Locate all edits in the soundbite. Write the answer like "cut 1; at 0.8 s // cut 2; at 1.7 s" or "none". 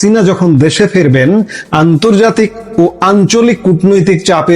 none